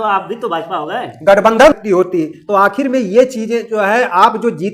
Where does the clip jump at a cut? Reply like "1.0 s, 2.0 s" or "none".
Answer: 1.7 s